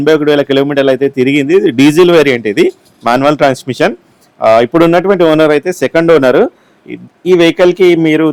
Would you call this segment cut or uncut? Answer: uncut